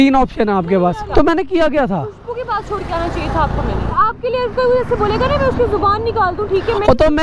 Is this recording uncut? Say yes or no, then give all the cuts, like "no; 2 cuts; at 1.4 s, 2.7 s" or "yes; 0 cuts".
no; 2 cuts; at 1.1 s, 4.0 s